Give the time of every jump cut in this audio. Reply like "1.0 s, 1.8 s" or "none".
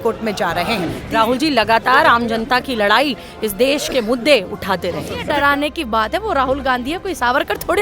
1.0 s, 5.1 s